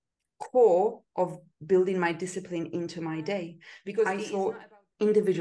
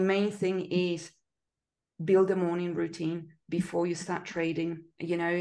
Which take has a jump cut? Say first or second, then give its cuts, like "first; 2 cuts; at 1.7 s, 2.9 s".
first; 1 cut; at 4.1 s